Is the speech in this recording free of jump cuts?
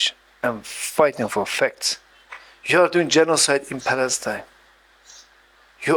yes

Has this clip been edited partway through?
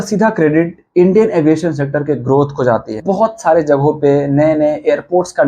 yes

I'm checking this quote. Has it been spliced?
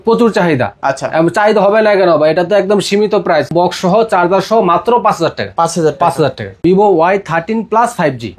yes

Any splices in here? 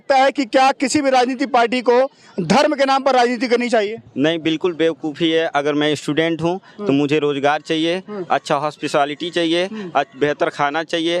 no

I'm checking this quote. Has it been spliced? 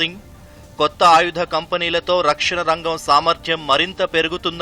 no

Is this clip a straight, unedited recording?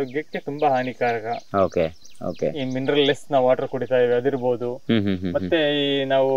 yes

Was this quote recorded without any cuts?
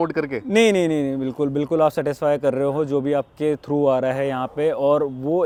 yes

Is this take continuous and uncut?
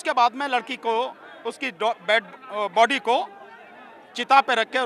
yes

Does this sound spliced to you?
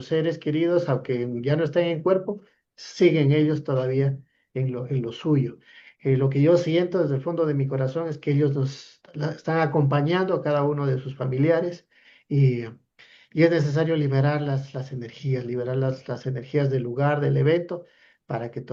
no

